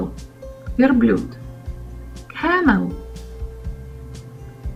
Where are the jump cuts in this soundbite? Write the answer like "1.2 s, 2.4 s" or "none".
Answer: none